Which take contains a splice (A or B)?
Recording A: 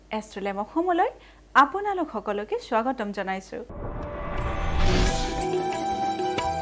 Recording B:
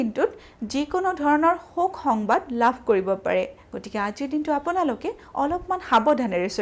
A